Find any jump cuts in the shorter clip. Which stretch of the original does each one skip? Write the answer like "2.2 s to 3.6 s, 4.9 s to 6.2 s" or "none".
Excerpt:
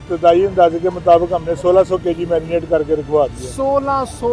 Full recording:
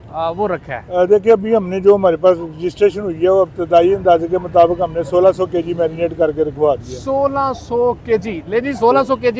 none